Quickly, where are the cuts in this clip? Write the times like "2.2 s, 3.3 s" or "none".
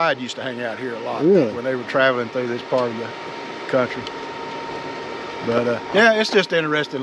none